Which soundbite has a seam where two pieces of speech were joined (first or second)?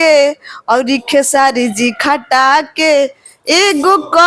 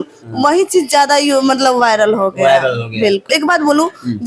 second